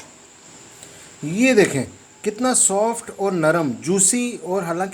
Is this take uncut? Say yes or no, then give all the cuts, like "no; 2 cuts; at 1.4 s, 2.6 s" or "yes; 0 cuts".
yes; 0 cuts